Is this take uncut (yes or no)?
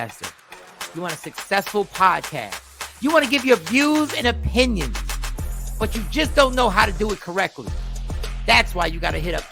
yes